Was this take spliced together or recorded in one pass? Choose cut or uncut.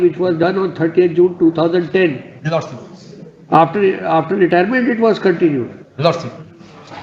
uncut